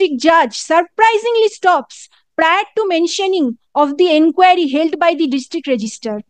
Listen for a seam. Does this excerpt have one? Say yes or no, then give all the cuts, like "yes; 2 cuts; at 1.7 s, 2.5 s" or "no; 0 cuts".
no; 0 cuts